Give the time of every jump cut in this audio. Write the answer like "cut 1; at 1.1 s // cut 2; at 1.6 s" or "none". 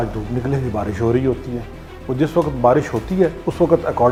none